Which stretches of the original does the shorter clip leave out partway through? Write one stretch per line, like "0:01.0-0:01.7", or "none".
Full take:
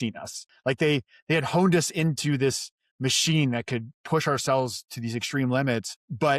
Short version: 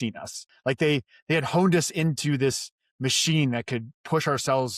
none